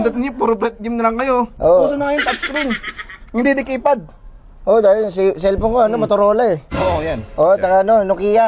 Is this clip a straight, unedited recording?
yes; 0 cuts

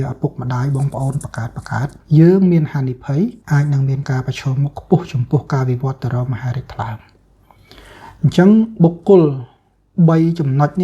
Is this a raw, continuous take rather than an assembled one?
no; 2 cuts; at 2.0 s, 3.4 s

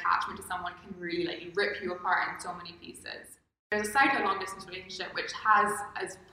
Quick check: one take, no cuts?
no; 1 cut; at 3.7 s

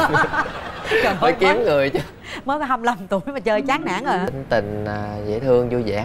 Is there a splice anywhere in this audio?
yes; 1 cut; at 4.3 s

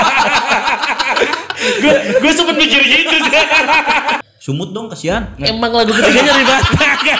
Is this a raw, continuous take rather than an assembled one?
no; 1 cut; at 4.2 s

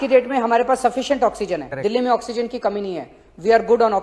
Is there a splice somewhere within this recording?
yes; 1 cut; at 1.7 s

